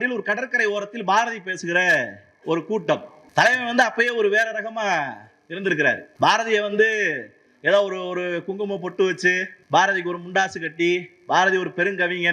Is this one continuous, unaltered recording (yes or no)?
no